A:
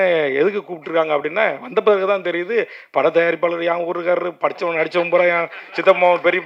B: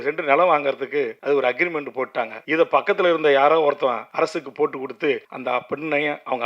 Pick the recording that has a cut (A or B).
B